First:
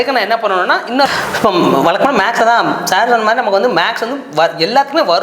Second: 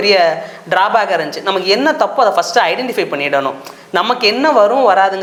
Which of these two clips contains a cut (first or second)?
first